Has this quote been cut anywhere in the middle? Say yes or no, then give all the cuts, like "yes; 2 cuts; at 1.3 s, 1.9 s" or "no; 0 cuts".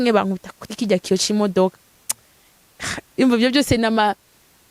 no; 0 cuts